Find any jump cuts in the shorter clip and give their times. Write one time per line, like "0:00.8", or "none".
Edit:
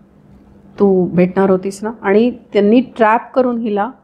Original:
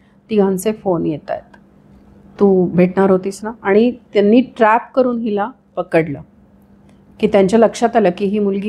none